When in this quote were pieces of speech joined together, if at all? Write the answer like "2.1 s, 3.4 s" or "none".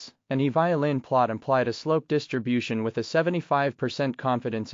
none